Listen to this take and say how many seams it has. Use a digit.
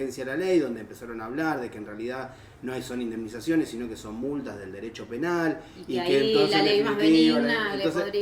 0